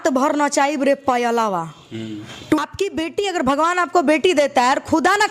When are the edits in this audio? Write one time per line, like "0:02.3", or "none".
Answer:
0:02.6